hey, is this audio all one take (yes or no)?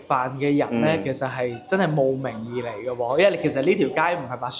yes